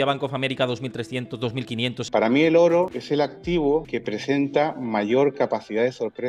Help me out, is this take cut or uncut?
cut